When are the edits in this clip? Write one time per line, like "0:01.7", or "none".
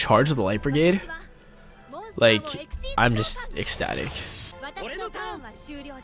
0:04.4